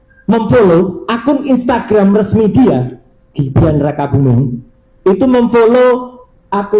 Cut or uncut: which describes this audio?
uncut